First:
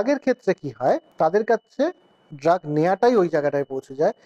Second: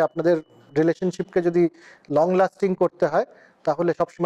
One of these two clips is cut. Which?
first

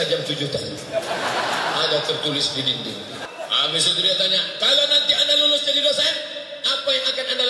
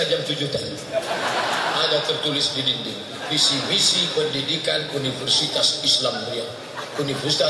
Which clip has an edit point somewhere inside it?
first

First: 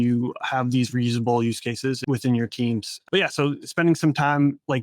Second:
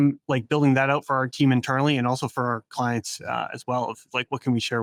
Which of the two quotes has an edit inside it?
first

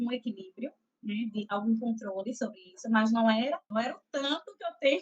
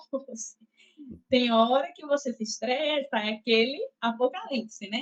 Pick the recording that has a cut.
first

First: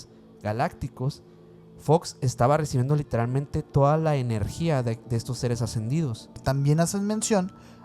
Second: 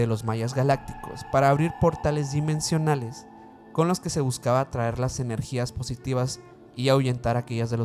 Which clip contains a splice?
first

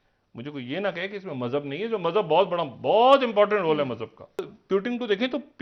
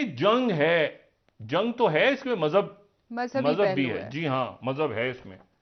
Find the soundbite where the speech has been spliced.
first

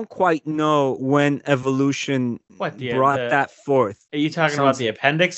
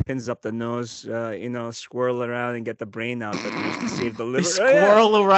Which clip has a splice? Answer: first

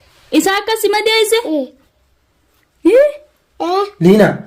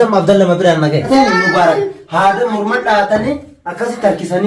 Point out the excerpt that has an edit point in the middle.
second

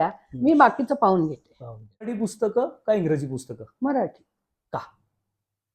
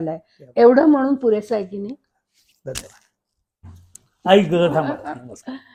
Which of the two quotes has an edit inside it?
first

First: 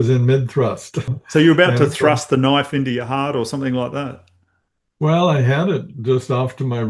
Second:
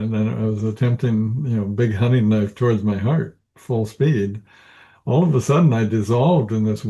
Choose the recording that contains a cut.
first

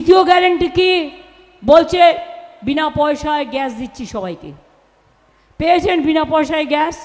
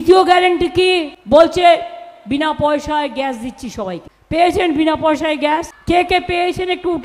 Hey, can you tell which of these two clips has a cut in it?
second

